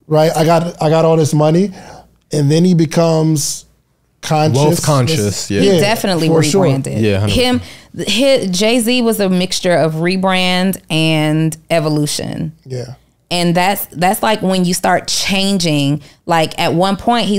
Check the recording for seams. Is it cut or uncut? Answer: uncut